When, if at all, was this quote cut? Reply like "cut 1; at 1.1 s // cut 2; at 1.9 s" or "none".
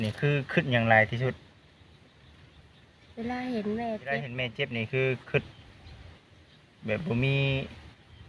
cut 1; at 4.4 s